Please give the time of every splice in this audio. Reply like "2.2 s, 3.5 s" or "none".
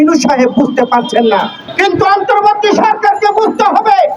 1.6 s